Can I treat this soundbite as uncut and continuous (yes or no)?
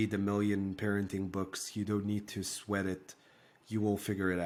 yes